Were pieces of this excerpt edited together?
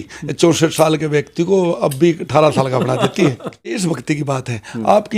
yes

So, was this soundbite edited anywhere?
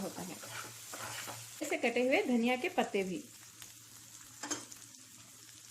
yes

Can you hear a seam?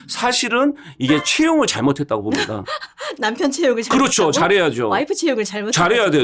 no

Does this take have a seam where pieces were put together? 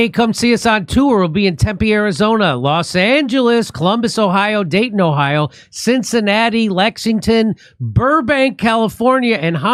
no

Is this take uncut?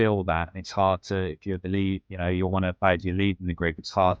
yes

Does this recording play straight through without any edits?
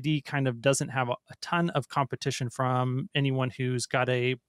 yes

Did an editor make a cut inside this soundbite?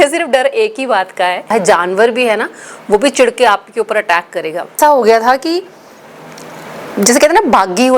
yes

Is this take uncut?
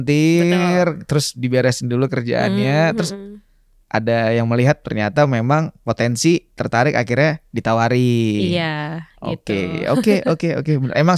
yes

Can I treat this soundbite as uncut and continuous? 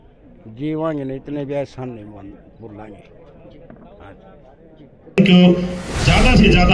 no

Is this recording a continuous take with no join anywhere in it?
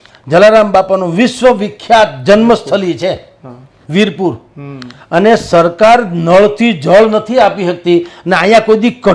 yes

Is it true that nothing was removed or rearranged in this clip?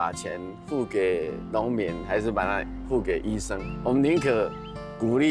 no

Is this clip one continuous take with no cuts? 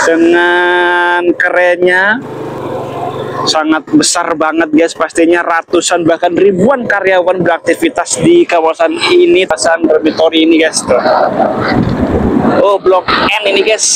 no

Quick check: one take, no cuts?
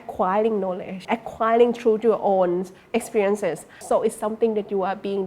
no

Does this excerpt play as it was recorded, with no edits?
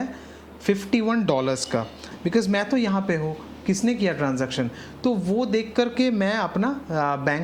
yes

